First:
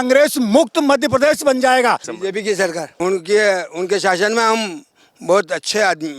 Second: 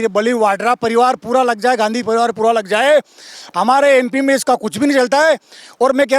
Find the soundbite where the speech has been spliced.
first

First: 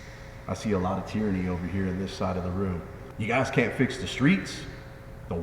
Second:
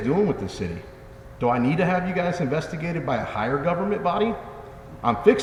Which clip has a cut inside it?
first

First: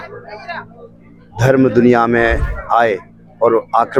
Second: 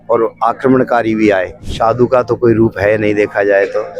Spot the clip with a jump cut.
second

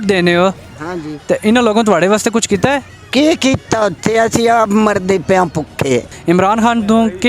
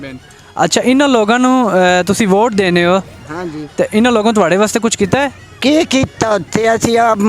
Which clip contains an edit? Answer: first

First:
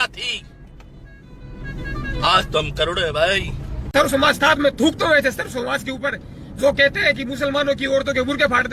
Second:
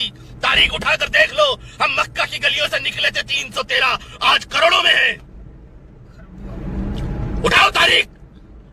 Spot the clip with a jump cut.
first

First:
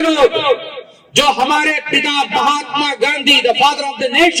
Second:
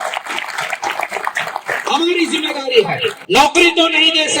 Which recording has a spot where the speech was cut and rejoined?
second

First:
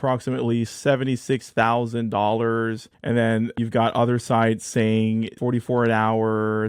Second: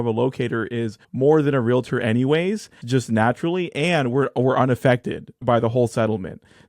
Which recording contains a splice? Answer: second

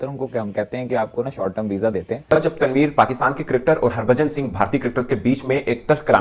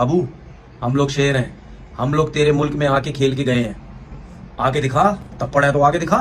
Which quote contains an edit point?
first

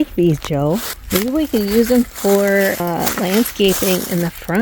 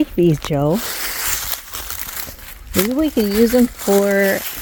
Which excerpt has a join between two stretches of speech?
first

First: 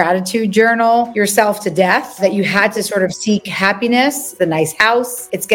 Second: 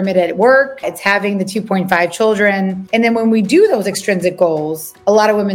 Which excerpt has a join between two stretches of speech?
first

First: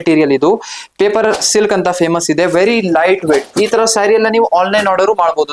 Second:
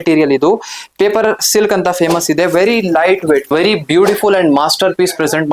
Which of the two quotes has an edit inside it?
first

